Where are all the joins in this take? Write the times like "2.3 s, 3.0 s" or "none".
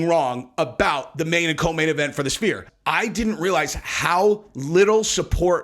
2.7 s